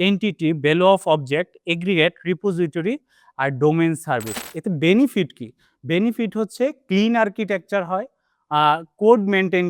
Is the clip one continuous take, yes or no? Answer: no